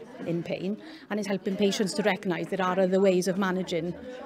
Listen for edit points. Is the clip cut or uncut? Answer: cut